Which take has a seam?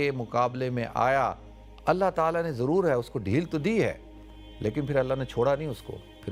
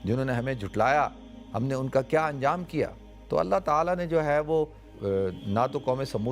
second; 1 cut; at 4.9 s

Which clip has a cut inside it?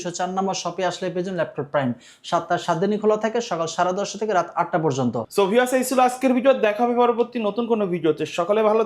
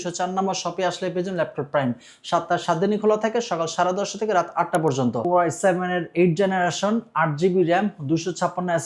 second; 1 cut; at 5.2 s

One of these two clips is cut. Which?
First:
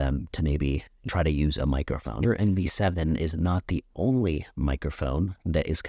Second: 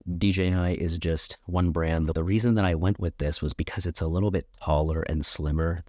first; 2 cuts; at 0.9 s, 2.2 s

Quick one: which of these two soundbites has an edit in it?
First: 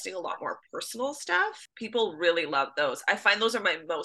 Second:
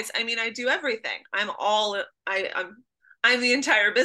first; 1 cut; at 1.6 s

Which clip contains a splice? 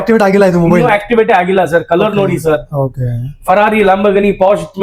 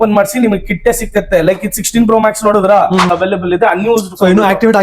second; 1 cut; at 3.1 s

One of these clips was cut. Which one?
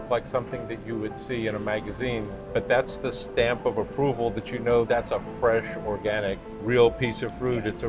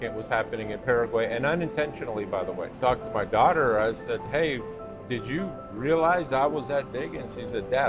second; 1 cut; at 2.7 s

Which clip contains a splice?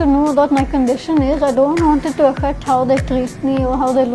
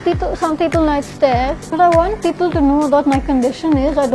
second; 1 cut; at 1.6 s

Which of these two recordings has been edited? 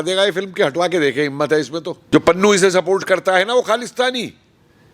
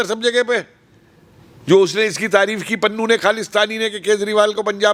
first; 1 cut; at 2.0 s

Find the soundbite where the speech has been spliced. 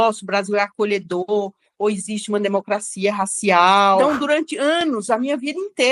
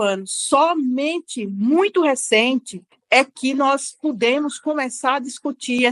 first; 1 cut; at 4.0 s

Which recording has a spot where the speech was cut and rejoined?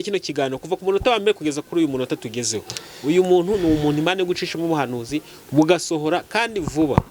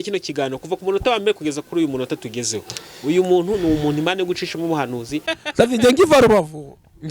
second; 1 cut; at 5.3 s

